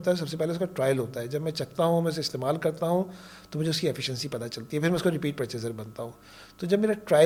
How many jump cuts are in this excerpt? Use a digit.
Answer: 0